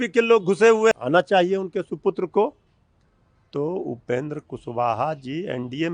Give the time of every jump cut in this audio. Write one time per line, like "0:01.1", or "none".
0:00.9

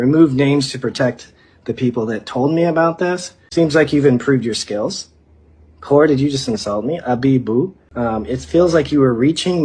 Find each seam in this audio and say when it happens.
0:03.3
0:07.8

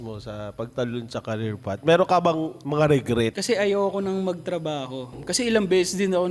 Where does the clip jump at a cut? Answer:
0:03.4
0:05.1

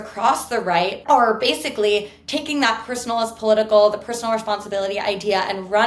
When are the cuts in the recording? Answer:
0:01.0

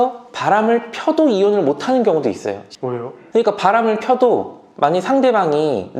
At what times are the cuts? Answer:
0:02.7

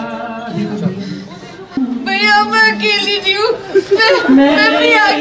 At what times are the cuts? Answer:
0:01.8

